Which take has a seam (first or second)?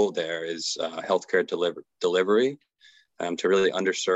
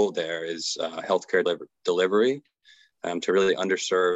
second